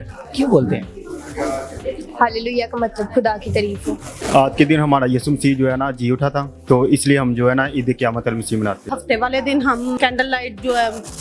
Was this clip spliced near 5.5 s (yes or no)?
no